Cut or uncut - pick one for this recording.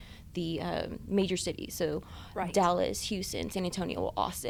uncut